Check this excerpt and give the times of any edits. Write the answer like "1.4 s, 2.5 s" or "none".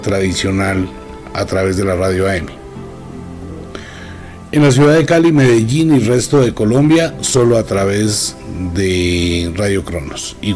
none